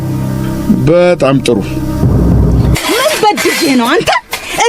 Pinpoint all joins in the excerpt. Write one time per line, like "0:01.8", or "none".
0:02.8